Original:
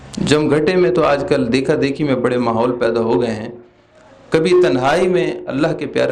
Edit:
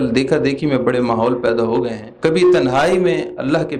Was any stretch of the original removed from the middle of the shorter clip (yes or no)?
yes